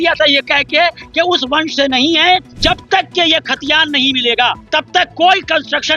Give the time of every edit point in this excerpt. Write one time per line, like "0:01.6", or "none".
0:02.5
0:04.6